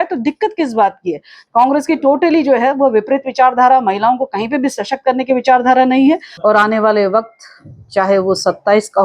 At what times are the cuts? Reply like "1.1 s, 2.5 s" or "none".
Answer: 1.4 s, 6.3 s